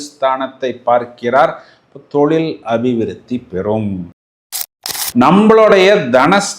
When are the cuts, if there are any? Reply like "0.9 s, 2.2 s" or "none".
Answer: 4.4 s